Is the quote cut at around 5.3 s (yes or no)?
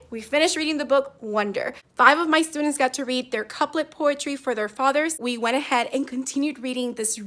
yes